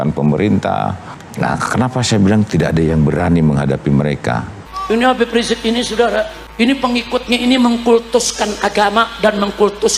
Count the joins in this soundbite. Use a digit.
3